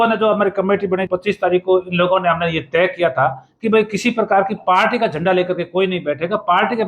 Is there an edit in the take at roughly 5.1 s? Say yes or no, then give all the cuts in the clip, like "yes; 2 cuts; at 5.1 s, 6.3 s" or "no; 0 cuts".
no; 1 cut; at 1.1 s